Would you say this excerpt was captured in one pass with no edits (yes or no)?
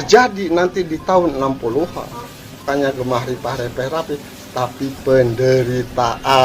no